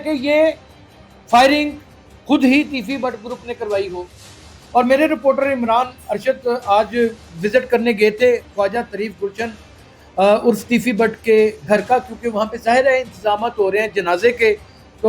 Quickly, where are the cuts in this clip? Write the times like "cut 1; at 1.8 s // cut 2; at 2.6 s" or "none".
cut 1; at 4.4 s